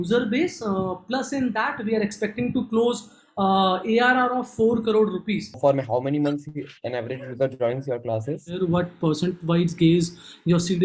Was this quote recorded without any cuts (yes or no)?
no